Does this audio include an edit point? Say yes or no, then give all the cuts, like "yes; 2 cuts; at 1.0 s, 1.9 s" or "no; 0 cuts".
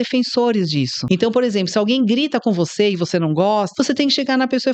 yes; 2 cuts; at 1.0 s, 3.7 s